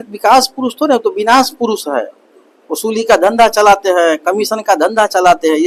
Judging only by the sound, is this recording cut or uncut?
uncut